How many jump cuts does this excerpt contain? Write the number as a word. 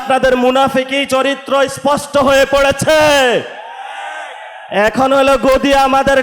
zero